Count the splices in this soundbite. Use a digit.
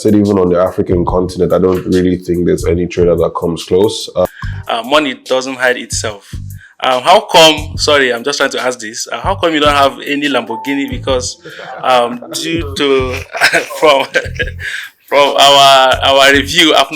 1